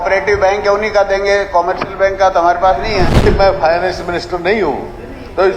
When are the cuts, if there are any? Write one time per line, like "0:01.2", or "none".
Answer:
0:03.3